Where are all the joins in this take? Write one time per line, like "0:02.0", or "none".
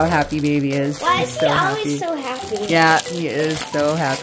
0:01.0